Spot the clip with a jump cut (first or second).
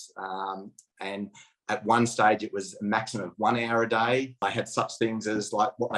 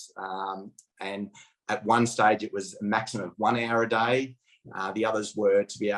first